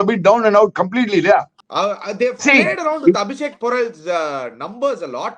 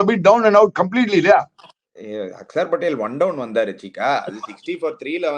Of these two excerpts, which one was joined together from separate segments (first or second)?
first